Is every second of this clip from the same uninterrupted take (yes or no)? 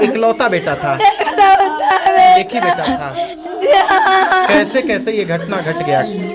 yes